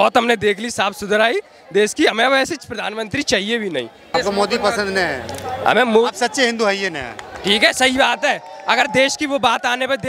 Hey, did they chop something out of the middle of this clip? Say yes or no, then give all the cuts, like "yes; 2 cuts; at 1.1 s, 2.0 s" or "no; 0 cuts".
yes; 1 cut; at 4.1 s